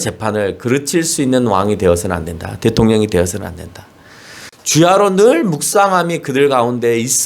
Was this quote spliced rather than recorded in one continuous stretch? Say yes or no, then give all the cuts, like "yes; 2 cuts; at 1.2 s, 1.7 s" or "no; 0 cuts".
yes; 1 cut; at 4.4 s